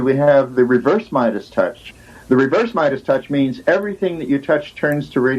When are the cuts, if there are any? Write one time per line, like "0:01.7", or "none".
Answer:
0:01.8